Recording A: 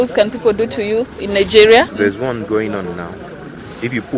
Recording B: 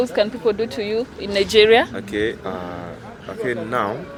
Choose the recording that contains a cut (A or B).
A